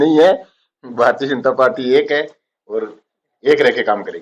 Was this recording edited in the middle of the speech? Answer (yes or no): no